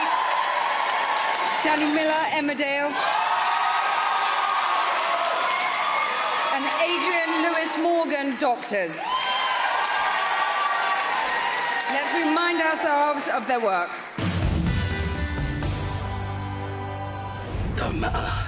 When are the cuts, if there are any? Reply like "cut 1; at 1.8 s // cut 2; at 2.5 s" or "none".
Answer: cut 1; at 9.9 s

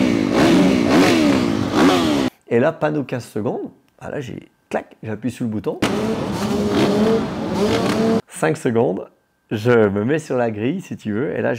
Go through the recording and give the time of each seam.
cut 1; at 2.3 s // cut 2; at 8.3 s

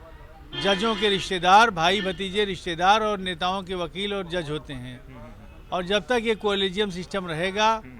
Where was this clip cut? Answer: none

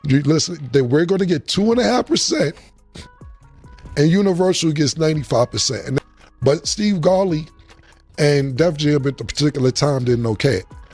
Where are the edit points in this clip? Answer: cut 1; at 6.0 s

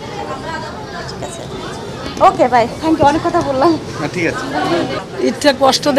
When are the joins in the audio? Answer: cut 1; at 5.0 s

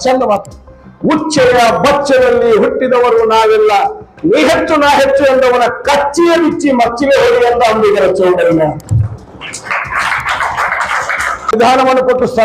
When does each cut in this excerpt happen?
cut 1; at 11.5 s

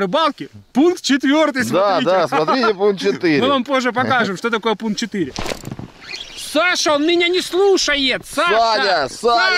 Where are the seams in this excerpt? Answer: cut 1; at 5.4 s

